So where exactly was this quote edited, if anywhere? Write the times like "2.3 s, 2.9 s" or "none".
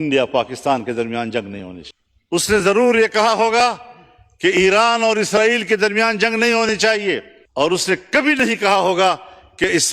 7.4 s